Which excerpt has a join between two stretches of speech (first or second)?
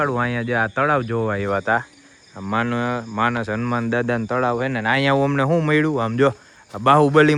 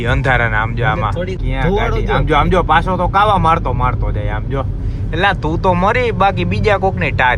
second